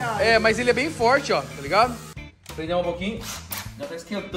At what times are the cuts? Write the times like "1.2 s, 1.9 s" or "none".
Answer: 2.1 s